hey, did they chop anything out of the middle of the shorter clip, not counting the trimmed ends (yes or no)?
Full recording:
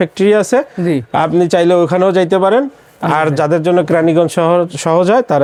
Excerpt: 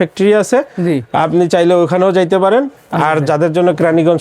yes